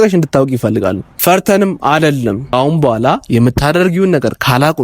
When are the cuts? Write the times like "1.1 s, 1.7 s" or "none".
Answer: 1.1 s, 2.5 s

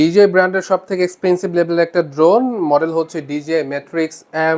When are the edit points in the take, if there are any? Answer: none

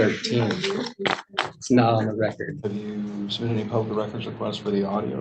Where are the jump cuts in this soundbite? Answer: 2.5 s

